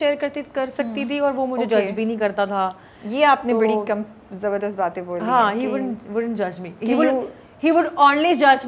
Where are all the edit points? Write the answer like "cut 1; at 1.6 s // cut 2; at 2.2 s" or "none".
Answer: none

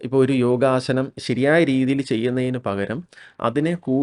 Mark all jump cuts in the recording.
cut 1; at 1.2 s

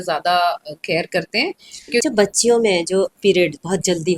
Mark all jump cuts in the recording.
cut 1; at 2.0 s

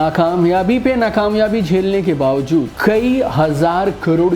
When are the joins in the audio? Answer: cut 1; at 2.7 s

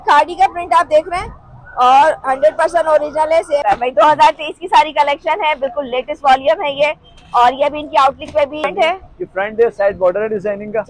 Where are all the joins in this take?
cut 1; at 3.6 s // cut 2; at 8.6 s

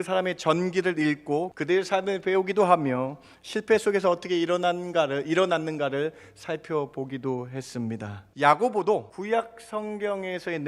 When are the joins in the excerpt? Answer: cut 1; at 1.5 s // cut 2; at 8.2 s // cut 3; at 9.1 s

